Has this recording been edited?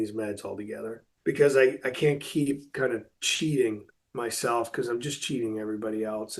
yes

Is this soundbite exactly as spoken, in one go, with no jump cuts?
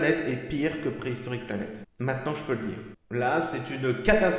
no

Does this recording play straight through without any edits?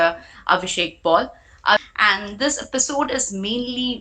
no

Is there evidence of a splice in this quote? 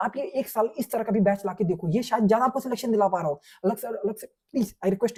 no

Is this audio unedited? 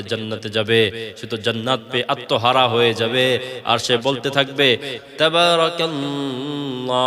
yes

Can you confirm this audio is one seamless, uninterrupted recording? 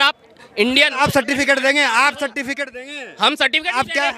yes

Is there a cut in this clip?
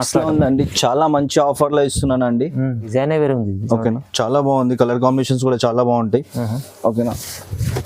yes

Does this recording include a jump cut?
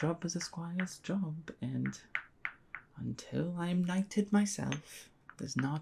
no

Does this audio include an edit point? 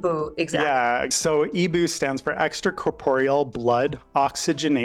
yes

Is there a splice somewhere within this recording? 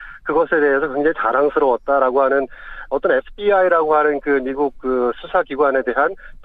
yes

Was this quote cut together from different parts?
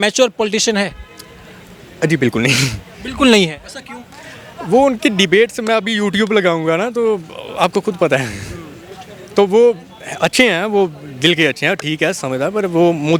no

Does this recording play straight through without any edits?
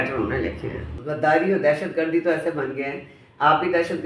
no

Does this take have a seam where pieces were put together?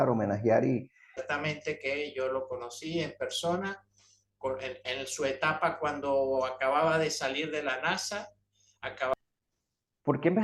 yes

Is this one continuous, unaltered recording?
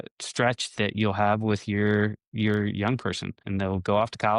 no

